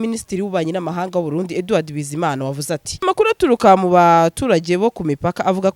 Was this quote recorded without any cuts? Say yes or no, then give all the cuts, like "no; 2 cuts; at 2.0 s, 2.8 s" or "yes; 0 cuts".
no; 1 cut; at 3.0 s